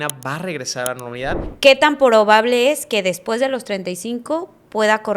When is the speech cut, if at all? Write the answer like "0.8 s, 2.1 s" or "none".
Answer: 1.5 s